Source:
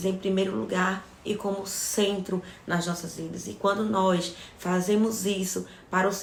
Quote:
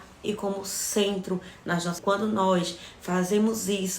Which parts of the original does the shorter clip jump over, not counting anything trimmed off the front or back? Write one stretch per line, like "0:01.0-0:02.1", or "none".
0:03.0-0:03.5